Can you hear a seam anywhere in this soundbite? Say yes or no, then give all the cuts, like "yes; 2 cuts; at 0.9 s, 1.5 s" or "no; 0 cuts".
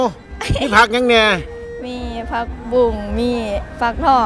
no; 0 cuts